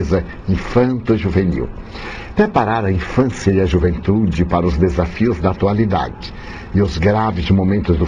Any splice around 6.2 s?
no; 1 cut; at 3.1 s

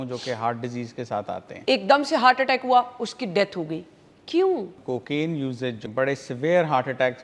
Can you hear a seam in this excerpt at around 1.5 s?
yes; 3 cuts; at 1.5 s, 4.8 s, 5.8 s

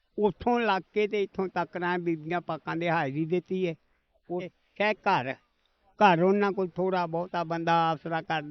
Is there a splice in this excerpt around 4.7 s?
yes; 1 cut; at 4.7 s

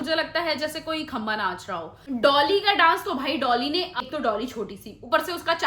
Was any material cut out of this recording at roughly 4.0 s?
yes; 2 cuts; at 1.9 s, 4.0 s

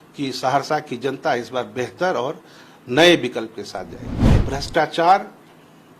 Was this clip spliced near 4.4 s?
yes; 1 cut; at 4.4 s

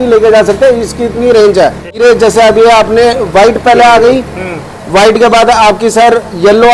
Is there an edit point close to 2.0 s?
yes; 1 cut; at 2.0 s

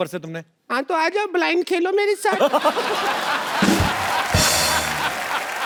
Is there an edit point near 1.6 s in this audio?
no; 0 cuts

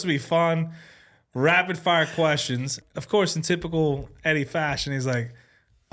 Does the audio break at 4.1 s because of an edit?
no; 1 cut; at 2.8 s

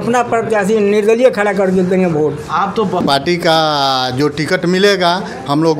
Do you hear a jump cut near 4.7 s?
no; 1 cut; at 3.0 s

